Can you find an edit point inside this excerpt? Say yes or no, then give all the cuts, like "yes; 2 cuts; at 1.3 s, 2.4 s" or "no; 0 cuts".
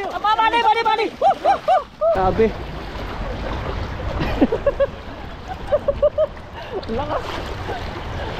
yes; 1 cut; at 2.2 s